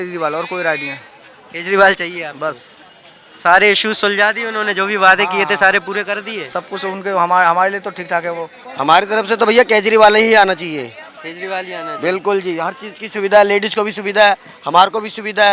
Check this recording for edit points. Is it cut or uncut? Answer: uncut